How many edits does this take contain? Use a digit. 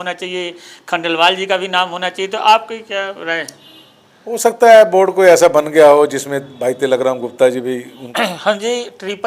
1